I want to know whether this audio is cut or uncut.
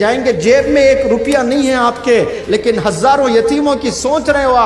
uncut